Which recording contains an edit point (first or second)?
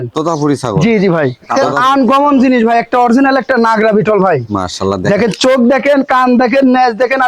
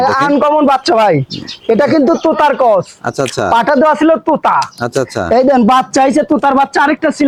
first